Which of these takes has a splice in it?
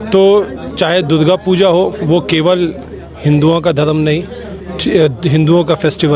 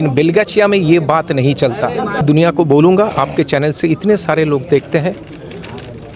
second; 1 cut; at 2.2 s

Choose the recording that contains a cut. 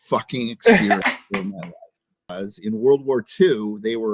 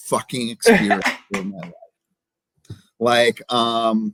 first; 1 cut; at 2.3 s

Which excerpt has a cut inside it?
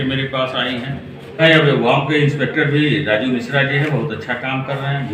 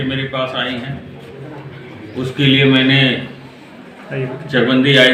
first; 1 cut; at 1.4 s

